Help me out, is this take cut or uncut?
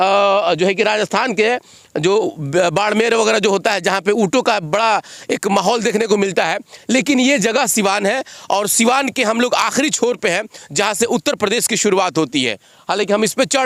uncut